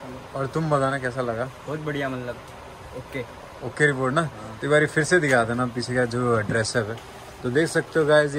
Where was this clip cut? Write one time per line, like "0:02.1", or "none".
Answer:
none